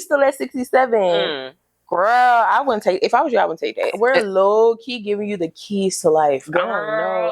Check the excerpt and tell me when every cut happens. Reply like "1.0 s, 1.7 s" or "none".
3.9 s